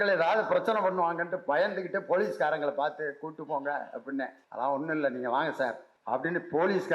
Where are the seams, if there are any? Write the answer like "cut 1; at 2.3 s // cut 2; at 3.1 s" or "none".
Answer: cut 1; at 4.4 s // cut 2; at 5.9 s